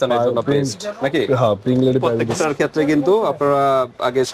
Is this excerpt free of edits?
no; 1 cut; at 2.3 s

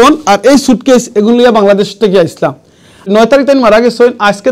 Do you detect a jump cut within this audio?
yes; 1 cut; at 3.1 s

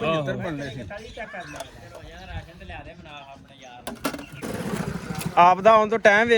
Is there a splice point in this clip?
yes; 1 cut; at 4.3 s

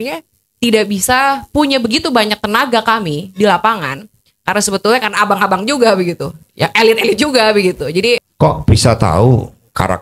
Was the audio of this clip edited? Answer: yes; 1 cut; at 8.3 s

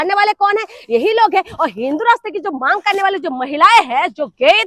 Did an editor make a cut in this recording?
no; 0 cuts

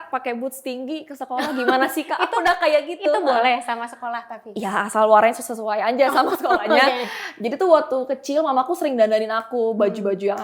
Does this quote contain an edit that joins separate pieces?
no; 0 cuts

